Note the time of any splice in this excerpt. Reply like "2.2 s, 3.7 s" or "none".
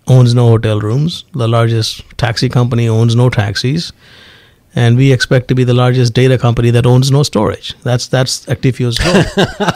none